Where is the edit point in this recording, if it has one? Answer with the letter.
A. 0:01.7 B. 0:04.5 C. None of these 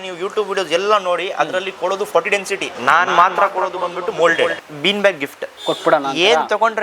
B